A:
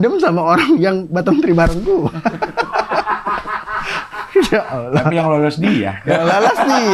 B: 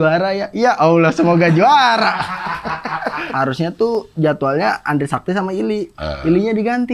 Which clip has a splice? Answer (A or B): B